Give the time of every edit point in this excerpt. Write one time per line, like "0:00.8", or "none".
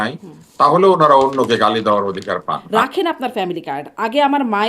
0:02.6